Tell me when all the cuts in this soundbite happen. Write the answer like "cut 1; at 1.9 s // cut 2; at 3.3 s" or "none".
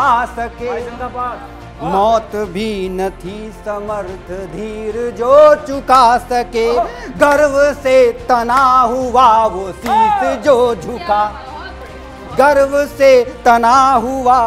none